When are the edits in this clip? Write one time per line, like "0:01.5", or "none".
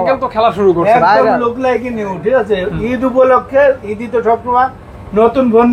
none